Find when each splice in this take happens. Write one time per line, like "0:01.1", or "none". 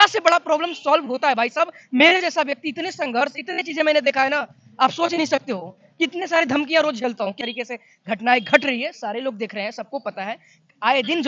0:07.3